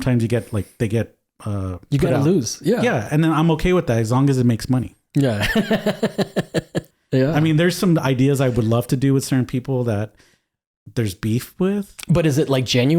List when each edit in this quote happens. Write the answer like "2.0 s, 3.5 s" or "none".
6.8 s, 11.9 s